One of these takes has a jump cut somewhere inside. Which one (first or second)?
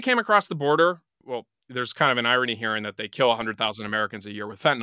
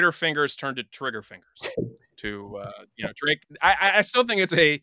first